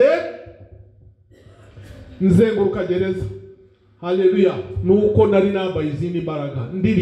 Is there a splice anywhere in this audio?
no; 0 cuts

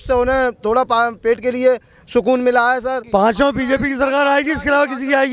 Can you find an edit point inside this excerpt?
yes; 1 cut; at 3.0 s

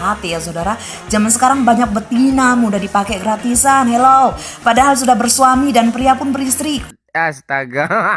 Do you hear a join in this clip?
yes; 1 cut; at 6.9 s

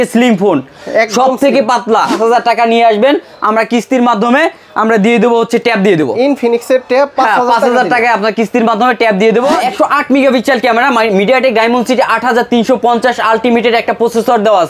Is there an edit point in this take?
yes; 2 cuts; at 2.1 s, 9.6 s

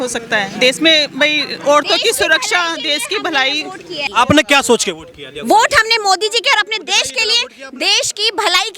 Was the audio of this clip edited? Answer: yes; 1 cut; at 4.1 s

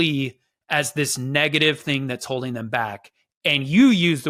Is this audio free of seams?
yes; 0 cuts

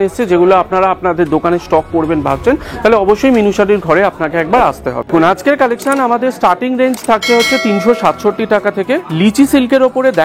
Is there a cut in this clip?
yes; 1 cut; at 5.1 s

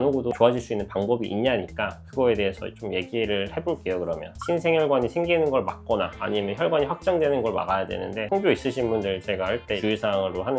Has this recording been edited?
yes; 2 cuts; at 4.4 s, 8.2 s

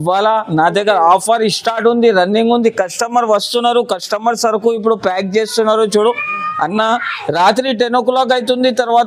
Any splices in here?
no; 0 cuts

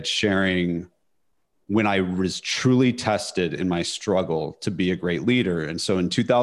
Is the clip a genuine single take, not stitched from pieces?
yes; 0 cuts

